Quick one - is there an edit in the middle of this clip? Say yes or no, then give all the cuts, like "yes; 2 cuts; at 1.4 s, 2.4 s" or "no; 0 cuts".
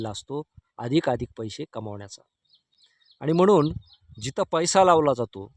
no; 0 cuts